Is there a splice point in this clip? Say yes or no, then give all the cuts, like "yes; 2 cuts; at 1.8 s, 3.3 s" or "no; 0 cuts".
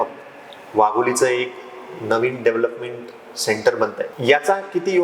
yes; 1 cut; at 4.1 s